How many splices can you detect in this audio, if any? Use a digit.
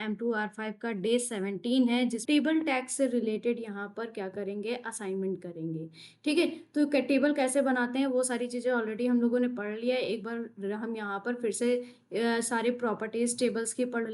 1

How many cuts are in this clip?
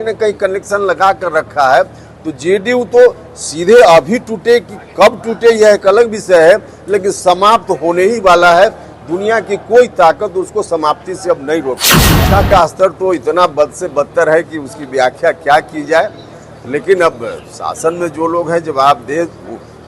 1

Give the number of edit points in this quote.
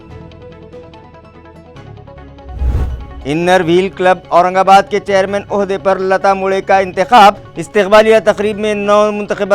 1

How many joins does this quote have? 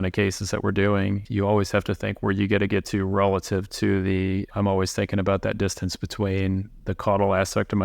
3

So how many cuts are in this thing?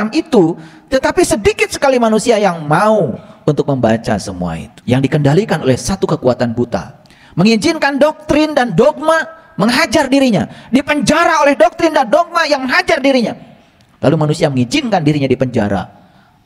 1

